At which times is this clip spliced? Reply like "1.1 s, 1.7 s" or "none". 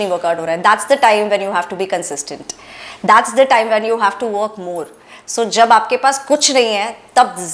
none

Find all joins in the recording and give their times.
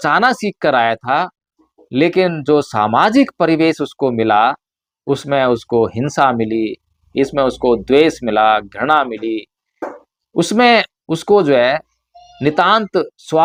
none

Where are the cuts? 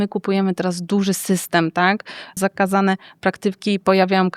2.3 s

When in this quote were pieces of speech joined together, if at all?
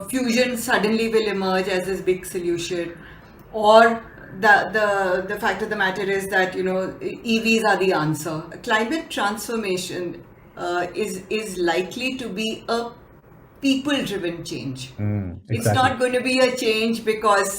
8.5 s

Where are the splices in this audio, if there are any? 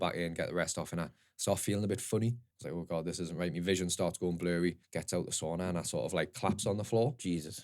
2.5 s, 4.9 s

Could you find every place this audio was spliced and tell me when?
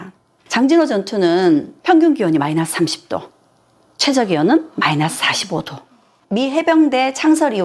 6.2 s

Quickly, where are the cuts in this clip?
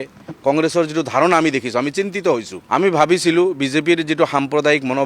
2.5 s

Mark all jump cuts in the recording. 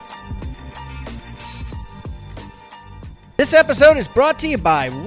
1.3 s, 3.2 s

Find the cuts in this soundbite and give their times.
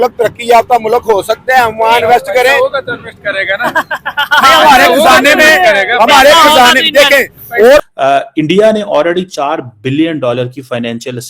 7.8 s

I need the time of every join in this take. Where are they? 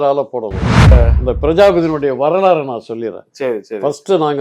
0.9 s

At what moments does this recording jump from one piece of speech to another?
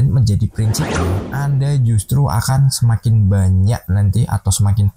1.1 s

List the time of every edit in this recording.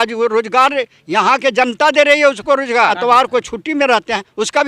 2.9 s

